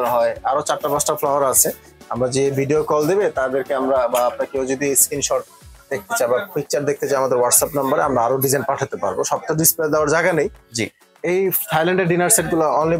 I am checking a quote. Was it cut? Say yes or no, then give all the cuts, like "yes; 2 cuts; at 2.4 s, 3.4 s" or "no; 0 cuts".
no; 0 cuts